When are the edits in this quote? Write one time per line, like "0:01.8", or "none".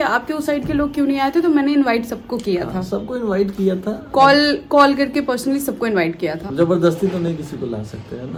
none